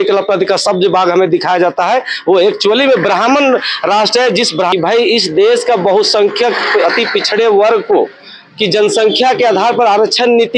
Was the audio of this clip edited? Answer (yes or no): yes